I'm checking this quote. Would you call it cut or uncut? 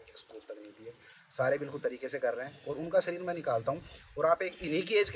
uncut